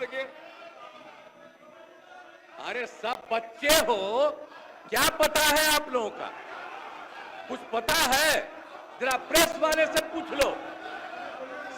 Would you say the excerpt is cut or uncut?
uncut